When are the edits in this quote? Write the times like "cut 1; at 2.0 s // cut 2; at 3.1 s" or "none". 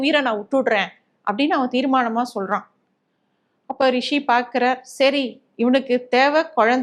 none

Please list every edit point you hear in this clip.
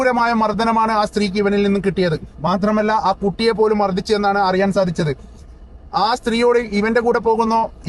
cut 1; at 6.0 s

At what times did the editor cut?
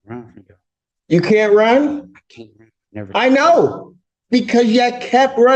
none

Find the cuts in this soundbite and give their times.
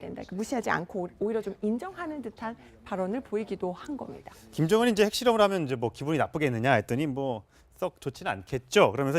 cut 1; at 6.7 s

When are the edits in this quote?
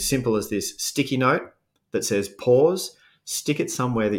none

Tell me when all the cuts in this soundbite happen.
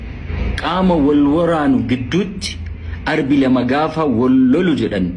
none

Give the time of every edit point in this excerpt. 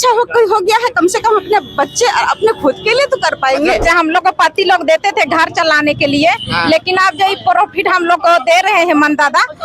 cut 1; at 3.8 s

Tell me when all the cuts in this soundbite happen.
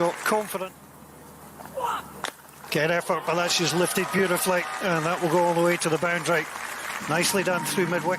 cut 1; at 1.7 s

